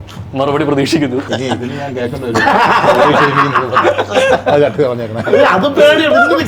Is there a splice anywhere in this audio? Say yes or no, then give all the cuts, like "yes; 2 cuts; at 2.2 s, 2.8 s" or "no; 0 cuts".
yes; 1 cut; at 1.3 s